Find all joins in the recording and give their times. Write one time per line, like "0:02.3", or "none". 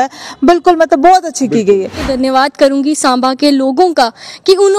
0:02.1

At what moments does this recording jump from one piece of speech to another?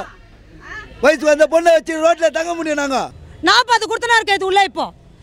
0:03.2

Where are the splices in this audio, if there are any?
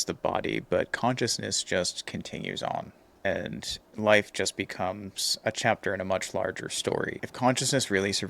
0:03.2
0:07.2

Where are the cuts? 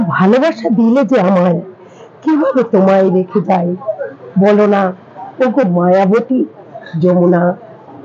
none

